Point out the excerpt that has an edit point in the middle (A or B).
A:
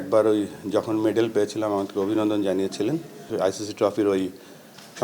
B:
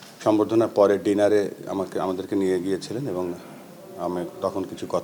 A